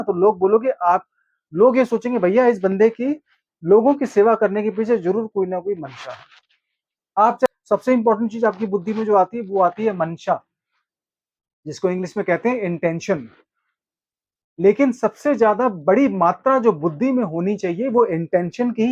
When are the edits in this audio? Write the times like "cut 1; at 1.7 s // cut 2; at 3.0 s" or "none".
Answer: cut 1; at 7.5 s